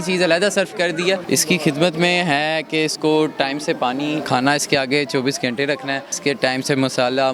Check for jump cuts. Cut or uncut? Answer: cut